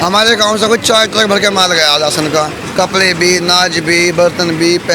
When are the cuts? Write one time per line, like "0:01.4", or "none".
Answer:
none